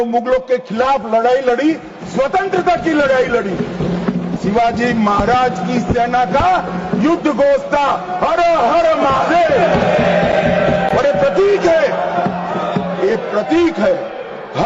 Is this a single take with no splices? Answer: no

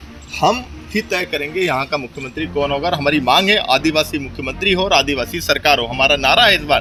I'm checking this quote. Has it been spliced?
no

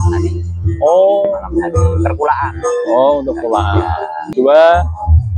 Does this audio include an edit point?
yes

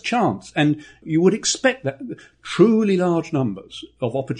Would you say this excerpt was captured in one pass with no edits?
no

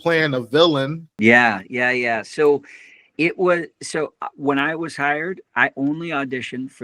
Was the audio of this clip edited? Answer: yes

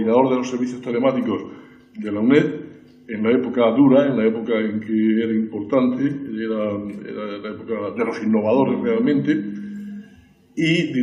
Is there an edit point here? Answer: no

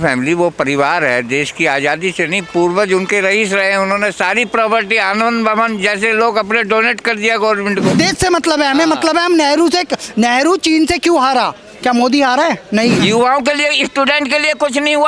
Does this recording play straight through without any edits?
no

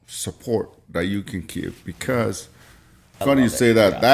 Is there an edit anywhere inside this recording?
yes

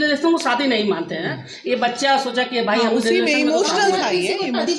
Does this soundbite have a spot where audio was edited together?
no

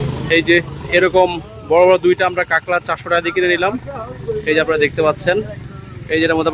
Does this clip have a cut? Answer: no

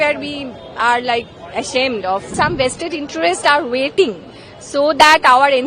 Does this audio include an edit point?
yes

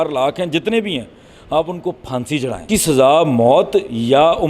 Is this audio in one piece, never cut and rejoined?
no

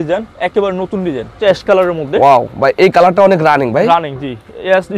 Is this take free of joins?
no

